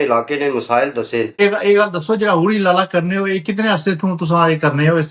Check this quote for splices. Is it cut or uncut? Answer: uncut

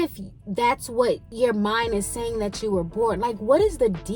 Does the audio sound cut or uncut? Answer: cut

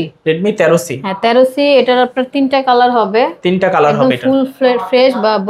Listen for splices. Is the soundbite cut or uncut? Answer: uncut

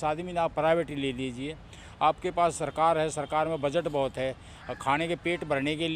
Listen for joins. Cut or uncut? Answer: uncut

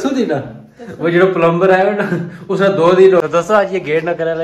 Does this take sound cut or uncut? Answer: cut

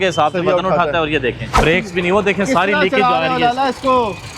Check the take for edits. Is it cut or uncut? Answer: cut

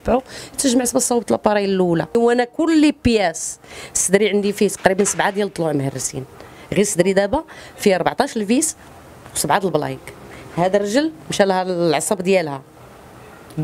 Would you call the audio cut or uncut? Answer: cut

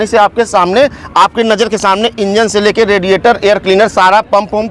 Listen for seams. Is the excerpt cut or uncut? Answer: uncut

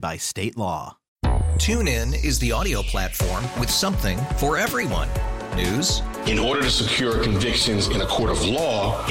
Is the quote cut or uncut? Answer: cut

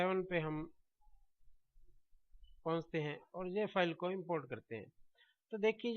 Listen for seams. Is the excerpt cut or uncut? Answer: cut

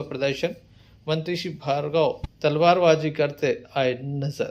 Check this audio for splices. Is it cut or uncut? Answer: uncut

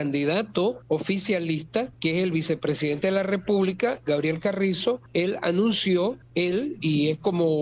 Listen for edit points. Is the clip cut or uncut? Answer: cut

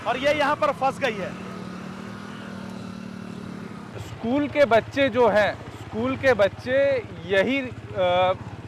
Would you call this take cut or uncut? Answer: cut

